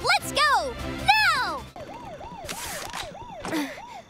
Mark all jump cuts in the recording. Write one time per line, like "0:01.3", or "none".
0:01.7